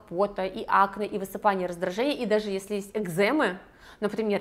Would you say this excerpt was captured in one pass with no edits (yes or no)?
yes